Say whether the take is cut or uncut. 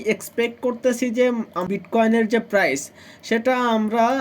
cut